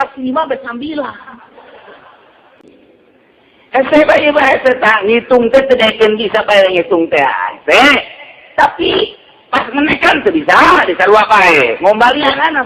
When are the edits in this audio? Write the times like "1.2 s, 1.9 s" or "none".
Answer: 2.5 s